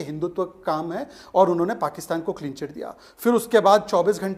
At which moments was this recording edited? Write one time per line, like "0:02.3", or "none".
none